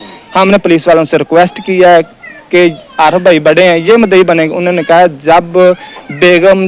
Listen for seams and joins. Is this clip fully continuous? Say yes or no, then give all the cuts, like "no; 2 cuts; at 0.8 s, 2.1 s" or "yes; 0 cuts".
yes; 0 cuts